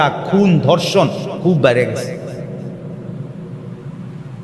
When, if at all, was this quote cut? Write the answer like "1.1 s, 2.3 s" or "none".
none